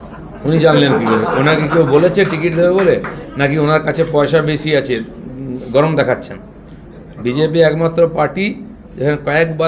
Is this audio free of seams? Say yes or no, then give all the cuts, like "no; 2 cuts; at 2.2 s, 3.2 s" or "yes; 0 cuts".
yes; 0 cuts